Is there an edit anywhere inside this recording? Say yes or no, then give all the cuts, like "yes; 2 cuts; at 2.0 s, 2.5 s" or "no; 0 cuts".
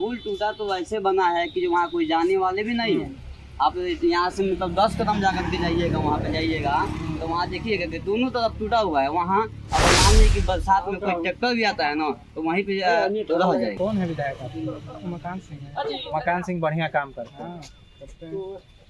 yes; 1 cut; at 13.7 s